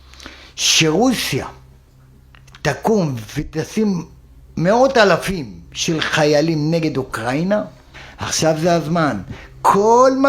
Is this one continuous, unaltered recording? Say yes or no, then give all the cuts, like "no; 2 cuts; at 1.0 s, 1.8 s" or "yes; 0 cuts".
no; 1 cut; at 7.8 s